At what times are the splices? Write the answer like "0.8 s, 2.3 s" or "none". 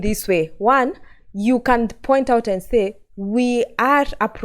none